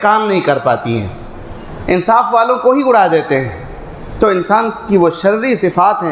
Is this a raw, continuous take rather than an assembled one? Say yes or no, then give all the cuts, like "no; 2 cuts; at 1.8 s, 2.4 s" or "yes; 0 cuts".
yes; 0 cuts